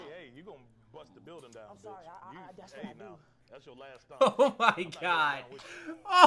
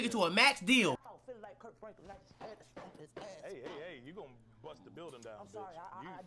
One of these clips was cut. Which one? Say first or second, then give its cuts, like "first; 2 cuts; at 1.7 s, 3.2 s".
second; 1 cut; at 1.0 s